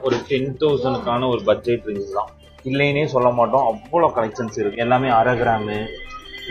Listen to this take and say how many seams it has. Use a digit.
0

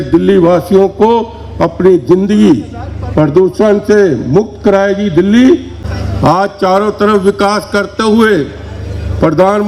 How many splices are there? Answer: 1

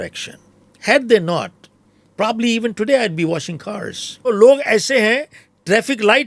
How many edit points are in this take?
1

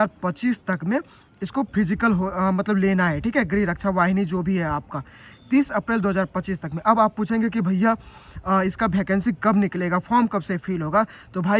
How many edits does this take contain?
0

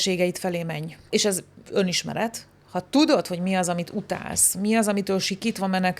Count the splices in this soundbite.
1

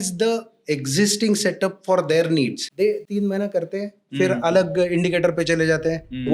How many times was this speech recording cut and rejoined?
1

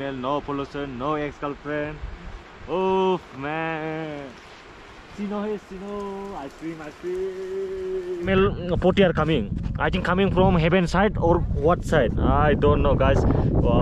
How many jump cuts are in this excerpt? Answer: 1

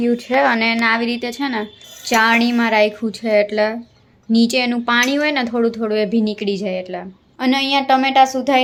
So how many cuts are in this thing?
0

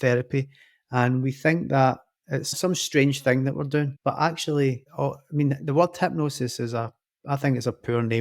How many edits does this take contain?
1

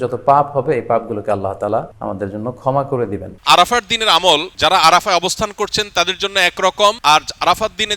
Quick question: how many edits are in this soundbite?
4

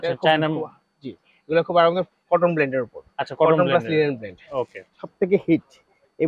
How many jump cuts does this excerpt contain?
1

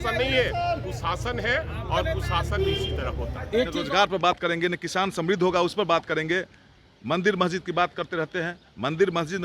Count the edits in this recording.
1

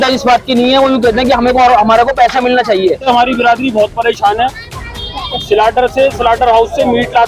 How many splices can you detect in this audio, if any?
1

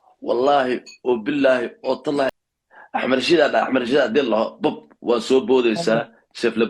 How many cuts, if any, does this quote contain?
1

